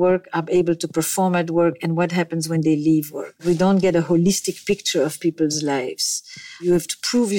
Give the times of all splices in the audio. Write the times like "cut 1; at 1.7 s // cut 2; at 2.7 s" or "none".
cut 1; at 3.4 s // cut 2; at 6.6 s

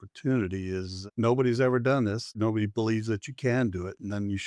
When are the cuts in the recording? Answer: cut 1; at 2.4 s

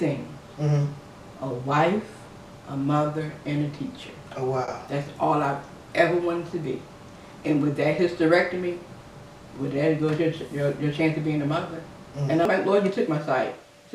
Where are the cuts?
cut 1; at 12.5 s

